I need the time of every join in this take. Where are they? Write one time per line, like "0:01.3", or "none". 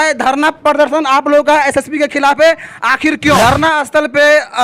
0:03.4